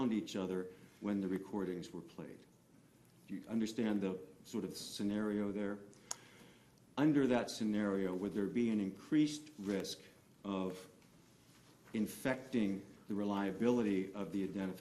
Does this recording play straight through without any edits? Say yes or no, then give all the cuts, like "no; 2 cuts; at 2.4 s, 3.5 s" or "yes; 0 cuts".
no; 1 cut; at 5.9 s